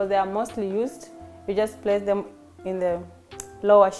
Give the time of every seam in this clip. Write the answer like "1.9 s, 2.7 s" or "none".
none

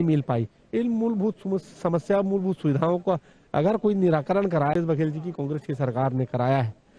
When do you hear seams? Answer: 4.7 s

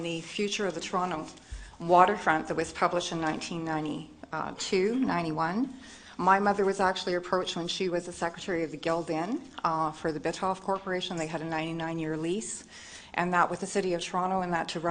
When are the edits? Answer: 11.7 s

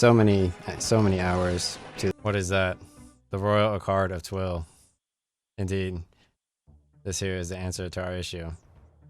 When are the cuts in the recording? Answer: 2.1 s

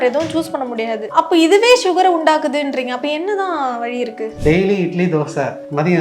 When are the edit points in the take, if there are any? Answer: 4.3 s

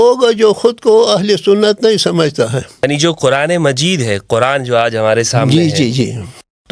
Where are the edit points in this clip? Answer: 2.8 s

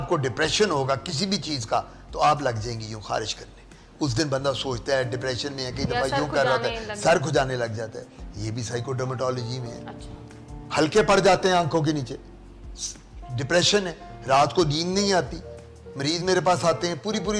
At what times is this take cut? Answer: none

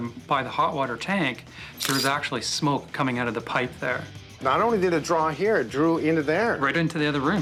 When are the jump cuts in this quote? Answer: none

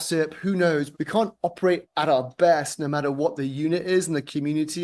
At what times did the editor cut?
0.9 s, 1.9 s

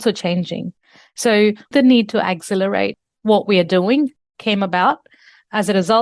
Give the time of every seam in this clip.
1.7 s

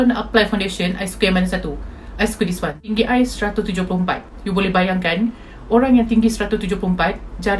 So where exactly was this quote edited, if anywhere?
2.8 s

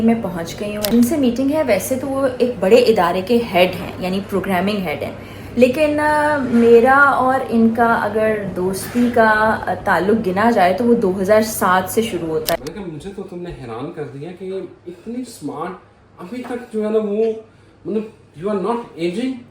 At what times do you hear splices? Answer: 0.9 s, 12.6 s

